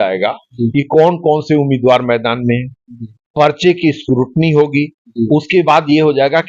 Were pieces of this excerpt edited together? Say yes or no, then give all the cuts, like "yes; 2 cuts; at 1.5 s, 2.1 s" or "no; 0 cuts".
no; 0 cuts